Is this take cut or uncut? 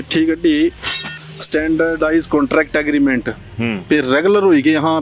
uncut